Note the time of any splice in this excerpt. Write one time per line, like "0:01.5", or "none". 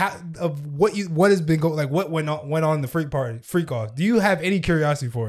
none